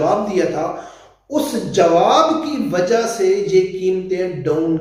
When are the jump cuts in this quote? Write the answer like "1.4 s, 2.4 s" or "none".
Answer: none